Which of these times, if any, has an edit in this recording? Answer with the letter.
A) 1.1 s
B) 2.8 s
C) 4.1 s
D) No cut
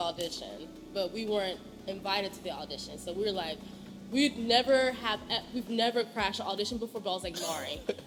D